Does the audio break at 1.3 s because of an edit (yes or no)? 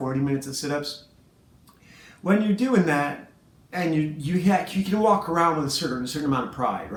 no